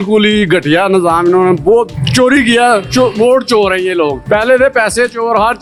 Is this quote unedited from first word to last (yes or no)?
yes